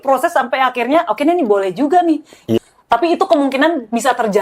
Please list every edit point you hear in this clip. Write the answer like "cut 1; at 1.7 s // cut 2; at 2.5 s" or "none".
cut 1; at 2.6 s